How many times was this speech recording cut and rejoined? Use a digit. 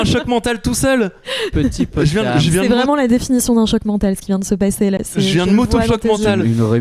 0